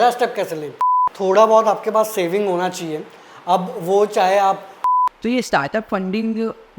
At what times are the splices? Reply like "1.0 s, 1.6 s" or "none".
1.0 s, 4.8 s